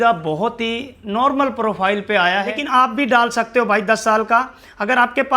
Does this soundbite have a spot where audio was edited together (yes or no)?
yes